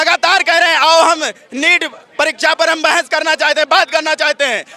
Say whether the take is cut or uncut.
uncut